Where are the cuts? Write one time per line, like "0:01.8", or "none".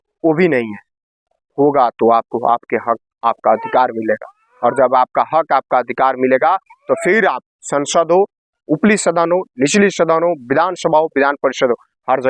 none